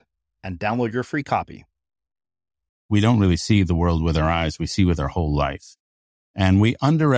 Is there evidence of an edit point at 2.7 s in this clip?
yes; 1 cut; at 2.7 s

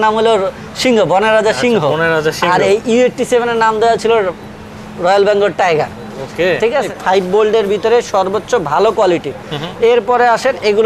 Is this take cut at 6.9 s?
yes; 1 cut; at 6.9 s

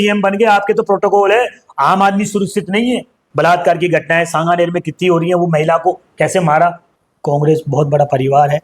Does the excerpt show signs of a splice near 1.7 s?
no; 2 cuts; at 3.2 s, 6.9 s

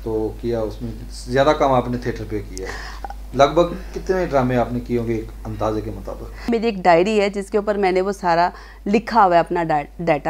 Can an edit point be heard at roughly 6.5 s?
yes; 1 cut; at 6.5 s

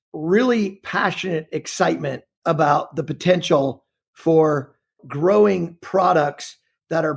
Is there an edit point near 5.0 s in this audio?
yes; 1 cut; at 5.0 s

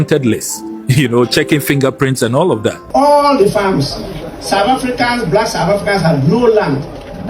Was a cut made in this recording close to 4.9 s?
no; 1 cut; at 2.9 s

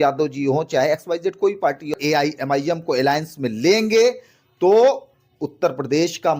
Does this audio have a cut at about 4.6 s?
no; 1 cut; at 1.9 s

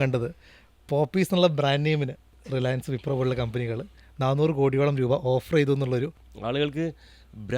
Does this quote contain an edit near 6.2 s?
yes; 2 cuts; at 2.3 s, 6.2 s

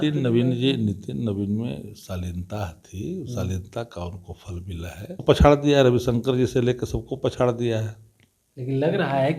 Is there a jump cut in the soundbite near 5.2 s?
yes; 1 cut; at 5.2 s

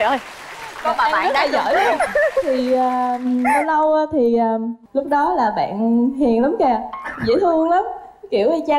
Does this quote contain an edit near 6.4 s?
no; 1 cut; at 4.8 s

